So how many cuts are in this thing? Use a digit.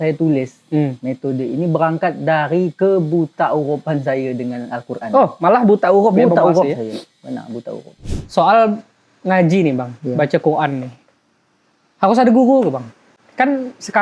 1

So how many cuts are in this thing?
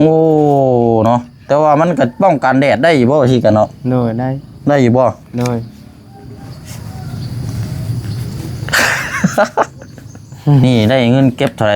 1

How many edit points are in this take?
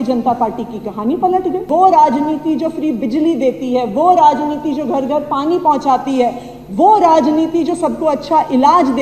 1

